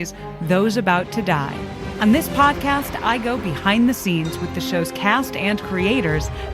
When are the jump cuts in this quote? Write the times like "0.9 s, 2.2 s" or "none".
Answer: 1.8 s